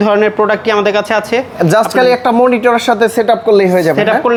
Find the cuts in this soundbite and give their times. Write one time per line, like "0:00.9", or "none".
none

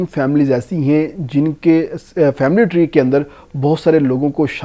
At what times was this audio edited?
none

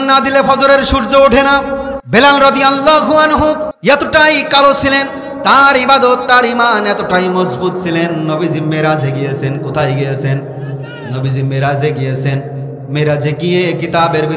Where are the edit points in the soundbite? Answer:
0:02.0
0:03.7

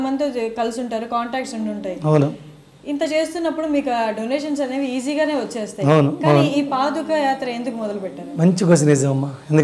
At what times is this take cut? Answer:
none

